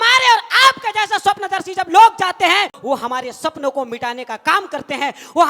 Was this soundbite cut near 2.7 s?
yes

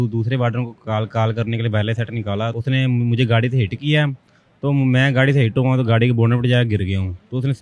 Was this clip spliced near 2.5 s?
yes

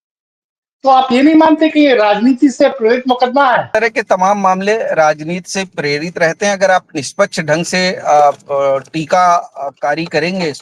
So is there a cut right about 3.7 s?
yes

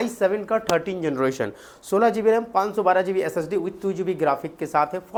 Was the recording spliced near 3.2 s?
no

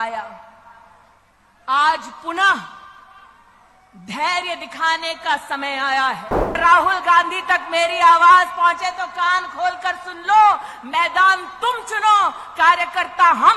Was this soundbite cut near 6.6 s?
yes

